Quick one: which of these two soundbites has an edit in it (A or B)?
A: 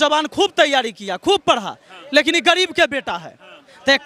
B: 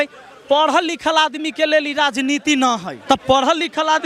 B